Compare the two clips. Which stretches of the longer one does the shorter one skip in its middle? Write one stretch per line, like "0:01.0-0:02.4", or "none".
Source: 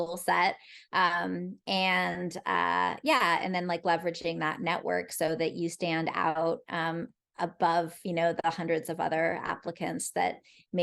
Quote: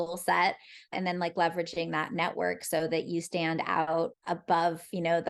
0:00.9-0:03.4
0:06.6-0:07.3